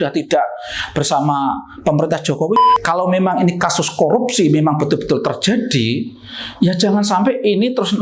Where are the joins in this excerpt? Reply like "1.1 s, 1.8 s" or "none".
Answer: 2.6 s